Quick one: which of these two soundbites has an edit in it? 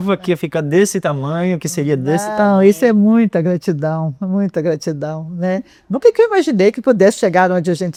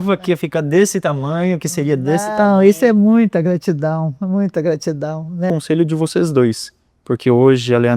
second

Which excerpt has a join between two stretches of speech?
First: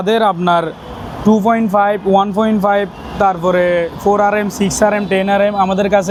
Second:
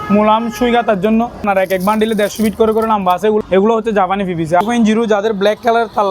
second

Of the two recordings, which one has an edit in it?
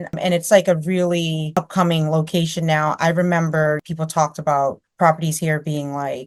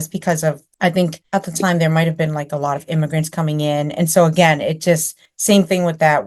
first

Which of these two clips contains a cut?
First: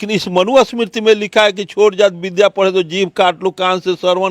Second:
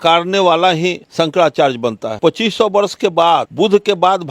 second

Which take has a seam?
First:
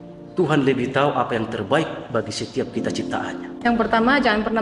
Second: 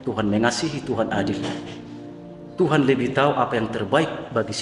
first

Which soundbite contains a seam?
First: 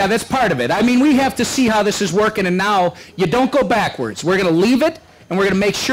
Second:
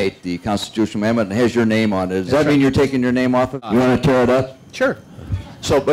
second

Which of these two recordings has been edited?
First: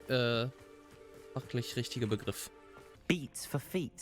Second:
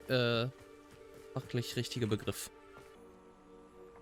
first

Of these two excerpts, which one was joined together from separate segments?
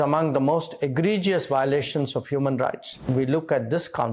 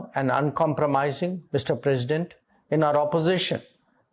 first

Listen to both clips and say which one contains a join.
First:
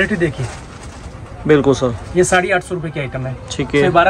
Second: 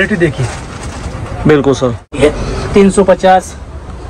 second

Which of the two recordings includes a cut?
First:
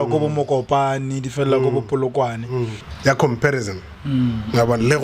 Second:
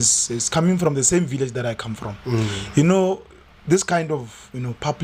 first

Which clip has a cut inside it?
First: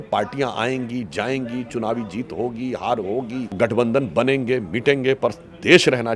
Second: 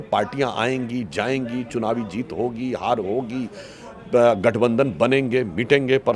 first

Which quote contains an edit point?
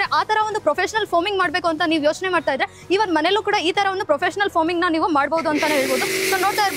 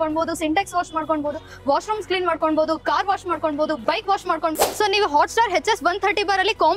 second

